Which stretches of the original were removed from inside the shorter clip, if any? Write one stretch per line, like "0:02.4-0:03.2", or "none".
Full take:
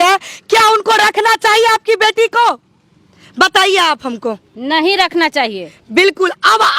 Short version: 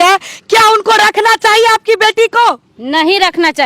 0:02.7-0:04.5